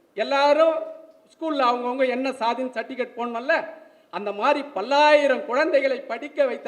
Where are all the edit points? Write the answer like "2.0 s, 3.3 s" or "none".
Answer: none